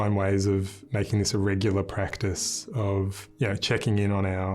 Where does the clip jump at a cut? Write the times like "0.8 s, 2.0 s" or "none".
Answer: 3.2 s